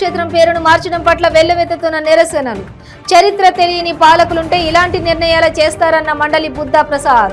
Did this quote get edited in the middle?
no; 0 cuts

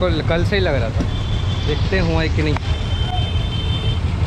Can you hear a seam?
no; 0 cuts

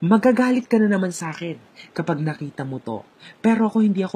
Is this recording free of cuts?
no; 1 cut; at 2.2 s

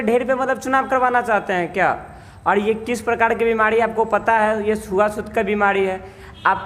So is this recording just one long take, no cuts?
yes; 0 cuts

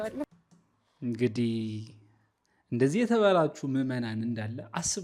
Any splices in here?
no; 0 cuts

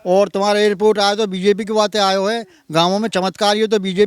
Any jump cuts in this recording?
no; 0 cuts

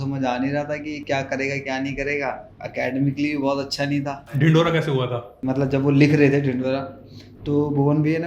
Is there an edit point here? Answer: yes; 3 cuts; at 2.5 s, 4.2 s, 5.4 s

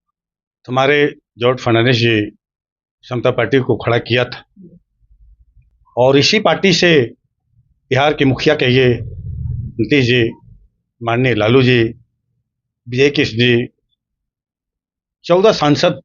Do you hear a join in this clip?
no; 0 cuts

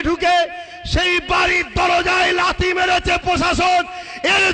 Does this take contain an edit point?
no; 0 cuts

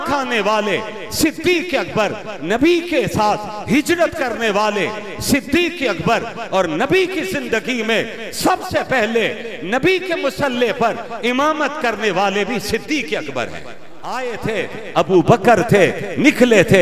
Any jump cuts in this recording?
yes; 1 cut; at 14.2 s

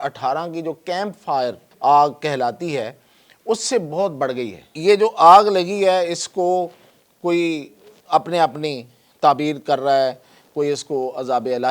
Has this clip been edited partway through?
yes; 2 cuts; at 1.7 s, 4.7 s

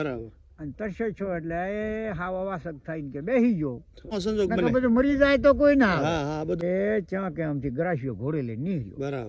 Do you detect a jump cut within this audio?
yes; 2 cuts; at 4.1 s, 6.6 s

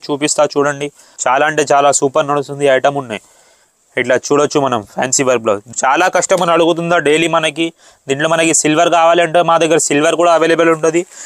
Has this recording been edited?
yes; 2 cuts; at 1.1 s, 5.7 s

